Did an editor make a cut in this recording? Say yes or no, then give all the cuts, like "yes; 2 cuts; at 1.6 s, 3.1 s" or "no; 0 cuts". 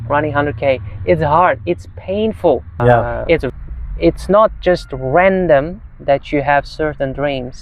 yes; 1 cut; at 3.5 s